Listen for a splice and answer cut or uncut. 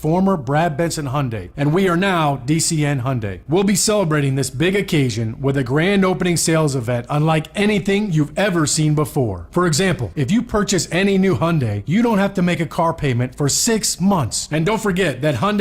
cut